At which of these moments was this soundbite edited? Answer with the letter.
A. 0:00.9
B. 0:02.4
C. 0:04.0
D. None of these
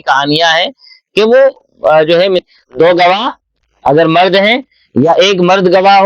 B